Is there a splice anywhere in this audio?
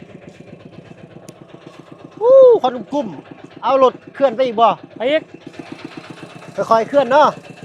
no; 0 cuts

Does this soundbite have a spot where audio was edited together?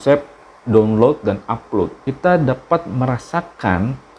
yes; 1 cut; at 2.1 s

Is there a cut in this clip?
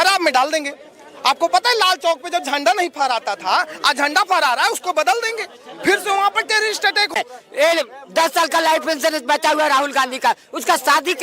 yes; 1 cut; at 7.1 s

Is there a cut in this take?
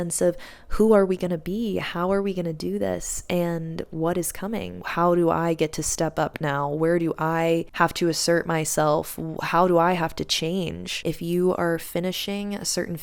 yes; 3 cuts; at 4.8 s, 7.7 s, 11.1 s

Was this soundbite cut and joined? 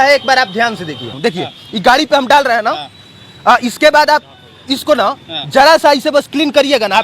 yes; 1 cut; at 1.1 s

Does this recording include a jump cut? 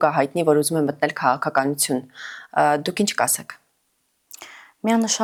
no; 0 cuts

